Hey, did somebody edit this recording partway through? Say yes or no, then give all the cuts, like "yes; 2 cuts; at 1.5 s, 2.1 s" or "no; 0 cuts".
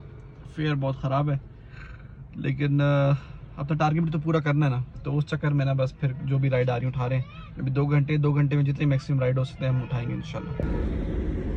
no; 0 cuts